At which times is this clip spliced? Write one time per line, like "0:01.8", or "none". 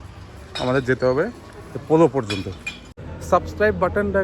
0:02.9

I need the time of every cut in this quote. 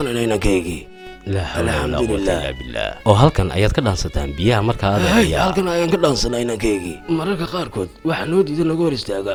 none

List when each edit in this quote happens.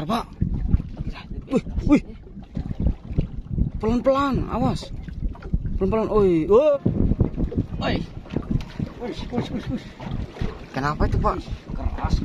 0:06.8

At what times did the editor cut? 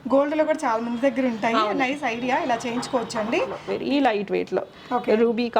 0:03.6

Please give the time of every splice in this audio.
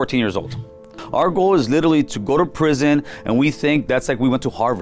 0:01.0
0:03.8

